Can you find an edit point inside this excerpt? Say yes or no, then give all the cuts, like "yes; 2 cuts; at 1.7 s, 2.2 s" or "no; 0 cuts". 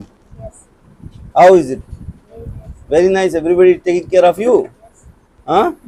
no; 0 cuts